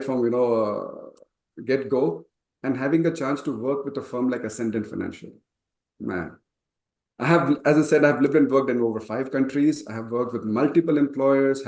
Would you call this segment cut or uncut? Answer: uncut